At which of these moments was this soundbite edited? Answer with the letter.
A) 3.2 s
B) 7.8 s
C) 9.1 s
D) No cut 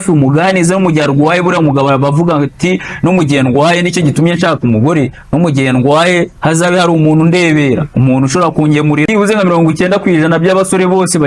C